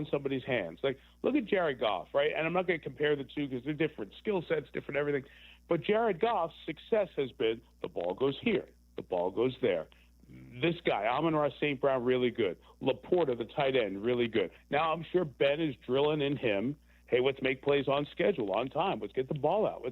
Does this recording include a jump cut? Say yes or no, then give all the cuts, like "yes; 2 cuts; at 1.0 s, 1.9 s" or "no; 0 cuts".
yes; 1 cut; at 14.6 s